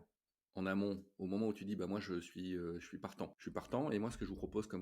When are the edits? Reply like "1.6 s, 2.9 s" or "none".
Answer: 3.3 s